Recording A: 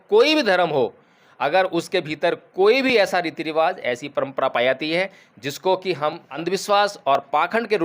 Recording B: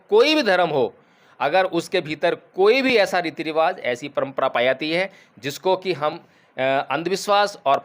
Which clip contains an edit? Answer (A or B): A